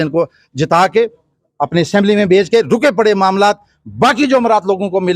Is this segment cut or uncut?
uncut